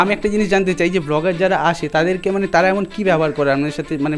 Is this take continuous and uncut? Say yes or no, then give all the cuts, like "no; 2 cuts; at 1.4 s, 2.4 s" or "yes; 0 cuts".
yes; 0 cuts